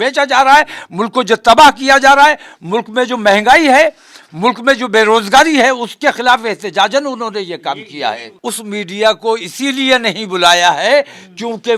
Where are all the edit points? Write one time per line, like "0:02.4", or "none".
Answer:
0:08.3